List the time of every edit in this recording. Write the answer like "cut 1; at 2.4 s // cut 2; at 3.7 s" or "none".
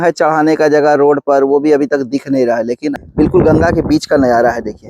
cut 1; at 2.9 s